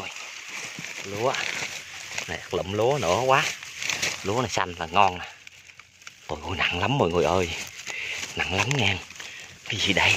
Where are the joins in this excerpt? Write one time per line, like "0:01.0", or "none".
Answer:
none

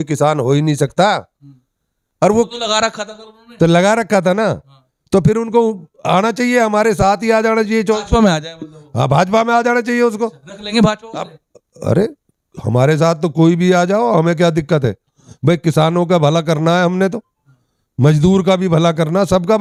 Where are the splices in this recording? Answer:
none

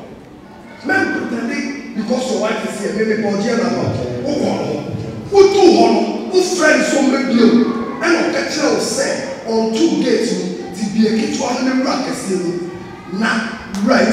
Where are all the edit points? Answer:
none

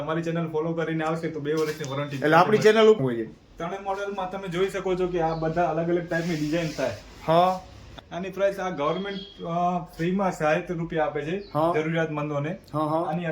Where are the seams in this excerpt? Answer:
0:03.0
0:07.9

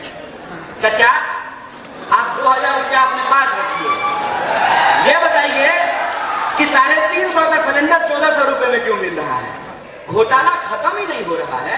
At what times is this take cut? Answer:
0:09.9

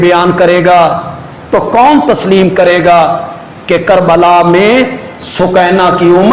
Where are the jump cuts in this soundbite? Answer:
none

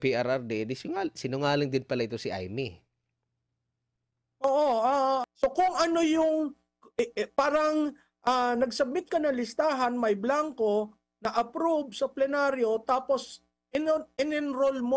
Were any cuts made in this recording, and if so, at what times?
0:05.2

